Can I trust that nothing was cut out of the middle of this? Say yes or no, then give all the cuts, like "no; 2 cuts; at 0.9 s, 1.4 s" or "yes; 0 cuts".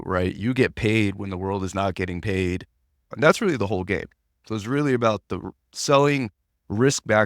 no; 1 cut; at 3.0 s